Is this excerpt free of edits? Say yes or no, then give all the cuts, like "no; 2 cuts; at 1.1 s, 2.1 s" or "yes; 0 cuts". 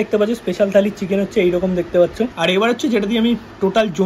no; 1 cut; at 2.4 s